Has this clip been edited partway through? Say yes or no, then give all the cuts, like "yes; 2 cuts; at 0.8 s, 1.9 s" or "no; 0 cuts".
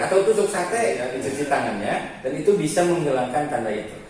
yes; 1 cut; at 1.0 s